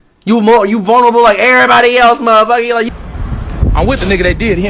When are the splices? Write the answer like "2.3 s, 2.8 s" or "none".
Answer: 2.9 s

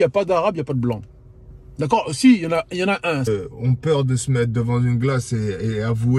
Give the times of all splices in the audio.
3.2 s

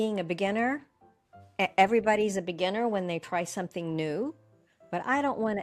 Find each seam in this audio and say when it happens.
none

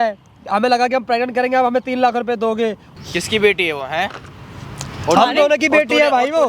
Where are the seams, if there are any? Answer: 2.8 s

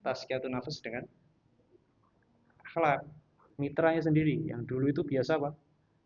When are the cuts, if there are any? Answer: 3.5 s

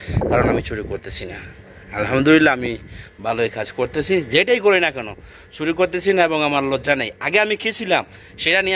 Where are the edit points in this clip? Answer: none

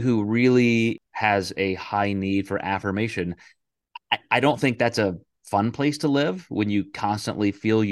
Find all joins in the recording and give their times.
1.1 s

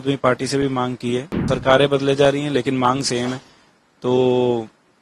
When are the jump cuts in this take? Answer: 1.3 s

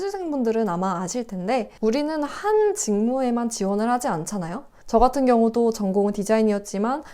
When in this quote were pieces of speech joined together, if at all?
1.7 s

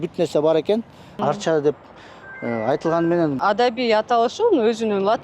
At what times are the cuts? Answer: 1.2 s, 3.4 s

